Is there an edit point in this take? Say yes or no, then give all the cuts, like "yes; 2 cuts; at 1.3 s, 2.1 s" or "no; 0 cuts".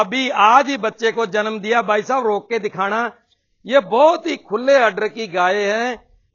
no; 0 cuts